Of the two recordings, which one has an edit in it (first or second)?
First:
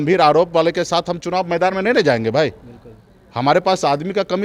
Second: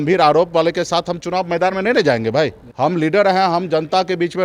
second